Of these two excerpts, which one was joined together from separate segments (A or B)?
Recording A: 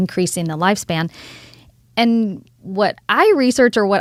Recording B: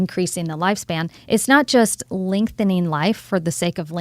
B